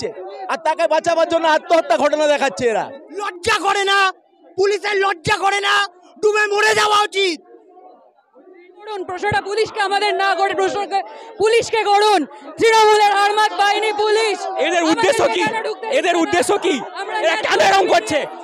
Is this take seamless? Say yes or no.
no